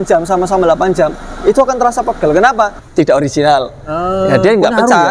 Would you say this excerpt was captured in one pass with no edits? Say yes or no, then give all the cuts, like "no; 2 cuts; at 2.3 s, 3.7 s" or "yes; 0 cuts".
no; 1 cut; at 2.8 s